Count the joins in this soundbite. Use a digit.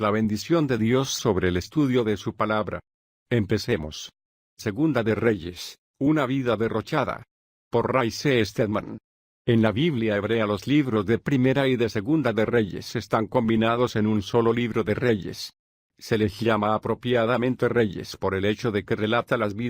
1